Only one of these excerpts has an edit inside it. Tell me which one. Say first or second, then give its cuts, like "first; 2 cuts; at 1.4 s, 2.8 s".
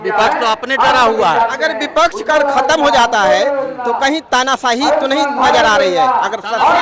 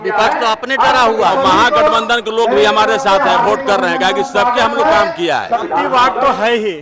second; 2 cuts; at 1.3 s, 5.6 s